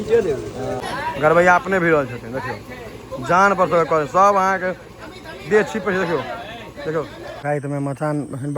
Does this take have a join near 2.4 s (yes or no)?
no